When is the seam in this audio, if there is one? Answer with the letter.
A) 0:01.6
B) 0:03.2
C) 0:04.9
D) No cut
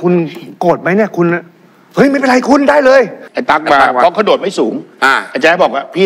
B